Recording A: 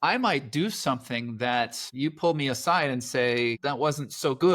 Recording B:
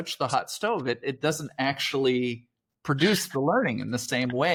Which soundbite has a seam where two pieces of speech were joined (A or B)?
A